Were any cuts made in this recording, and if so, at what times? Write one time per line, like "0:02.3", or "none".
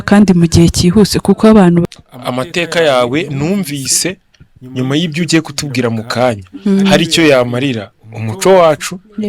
0:01.8